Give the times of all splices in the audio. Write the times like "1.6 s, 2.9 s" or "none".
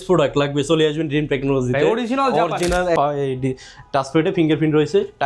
2.9 s